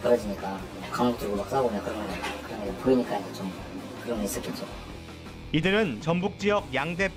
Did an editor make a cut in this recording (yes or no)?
no